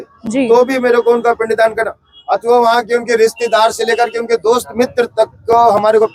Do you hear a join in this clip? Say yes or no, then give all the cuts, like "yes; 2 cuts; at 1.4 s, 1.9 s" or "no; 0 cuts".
no; 0 cuts